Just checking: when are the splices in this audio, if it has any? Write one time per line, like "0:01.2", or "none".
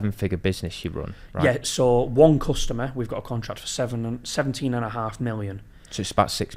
none